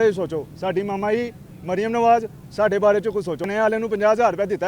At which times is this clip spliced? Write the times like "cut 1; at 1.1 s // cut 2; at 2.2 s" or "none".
cut 1; at 3.5 s